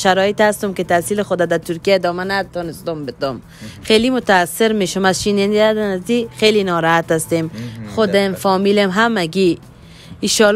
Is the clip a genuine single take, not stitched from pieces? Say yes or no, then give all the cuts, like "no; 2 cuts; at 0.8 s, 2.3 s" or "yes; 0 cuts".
yes; 0 cuts